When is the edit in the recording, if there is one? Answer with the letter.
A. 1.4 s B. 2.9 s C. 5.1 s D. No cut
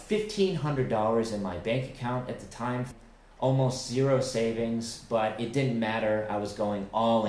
B